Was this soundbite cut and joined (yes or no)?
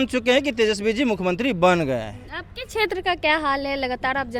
no